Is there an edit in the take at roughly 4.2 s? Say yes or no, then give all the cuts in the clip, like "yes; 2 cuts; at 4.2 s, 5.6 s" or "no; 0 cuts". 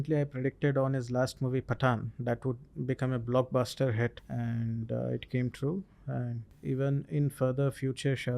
yes; 2 cuts; at 4.2 s, 6.5 s